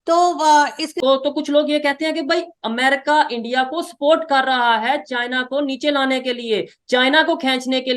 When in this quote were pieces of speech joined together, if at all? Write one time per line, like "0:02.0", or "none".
0:00.9